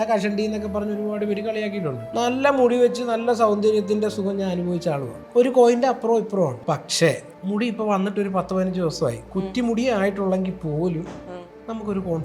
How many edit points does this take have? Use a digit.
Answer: 4